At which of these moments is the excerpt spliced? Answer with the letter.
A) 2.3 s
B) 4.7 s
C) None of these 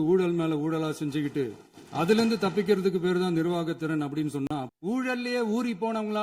B